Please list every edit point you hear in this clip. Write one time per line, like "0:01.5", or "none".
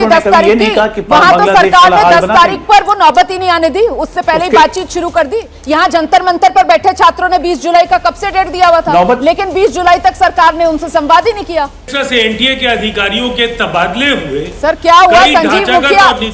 0:11.9